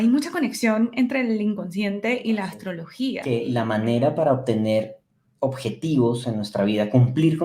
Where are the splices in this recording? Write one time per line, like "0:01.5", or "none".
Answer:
0:03.2